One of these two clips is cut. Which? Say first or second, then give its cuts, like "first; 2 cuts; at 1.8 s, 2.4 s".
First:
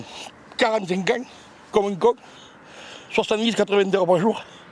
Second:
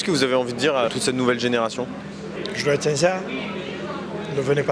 second; 2 cuts; at 0.9 s, 2.2 s